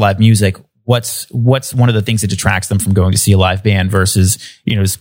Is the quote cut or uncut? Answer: uncut